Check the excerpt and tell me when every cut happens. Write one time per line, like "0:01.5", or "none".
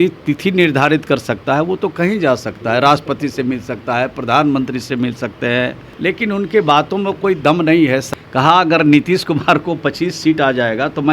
0:05.8
0:08.1